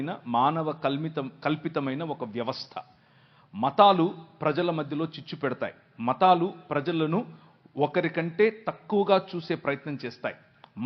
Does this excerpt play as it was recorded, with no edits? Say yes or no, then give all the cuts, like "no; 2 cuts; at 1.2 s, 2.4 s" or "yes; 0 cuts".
yes; 0 cuts